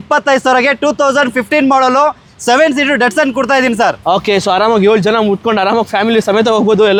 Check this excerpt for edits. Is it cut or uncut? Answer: uncut